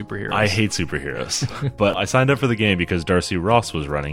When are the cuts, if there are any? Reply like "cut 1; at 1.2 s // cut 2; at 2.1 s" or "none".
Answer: cut 1; at 1.9 s